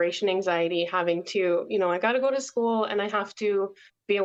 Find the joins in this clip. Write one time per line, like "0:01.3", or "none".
none